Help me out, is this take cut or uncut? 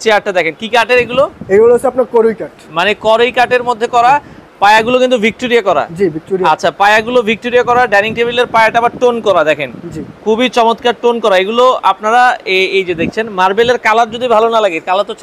uncut